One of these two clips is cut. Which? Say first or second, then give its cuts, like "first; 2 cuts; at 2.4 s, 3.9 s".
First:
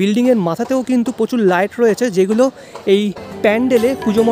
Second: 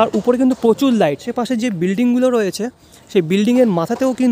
second; 1 cut; at 1.3 s